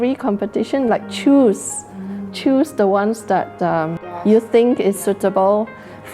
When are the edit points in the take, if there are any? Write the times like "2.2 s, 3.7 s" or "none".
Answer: 4.0 s